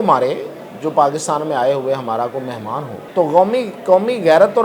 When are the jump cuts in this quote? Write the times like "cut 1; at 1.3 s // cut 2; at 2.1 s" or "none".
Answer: cut 1; at 3.0 s